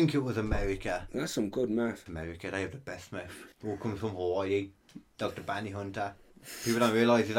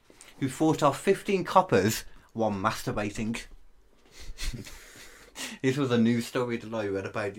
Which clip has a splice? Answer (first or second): first